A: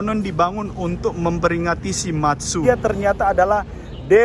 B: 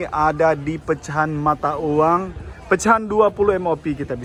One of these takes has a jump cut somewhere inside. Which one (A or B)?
A